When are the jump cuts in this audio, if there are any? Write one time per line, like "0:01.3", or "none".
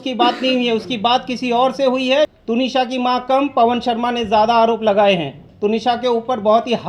0:02.3
0:05.4

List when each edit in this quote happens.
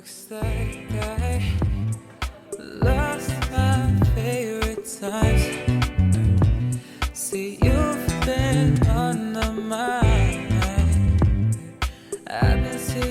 none

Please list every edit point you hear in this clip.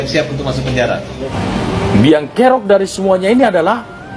0:01.1

